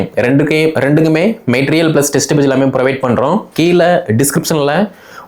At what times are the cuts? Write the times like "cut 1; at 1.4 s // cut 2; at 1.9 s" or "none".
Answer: none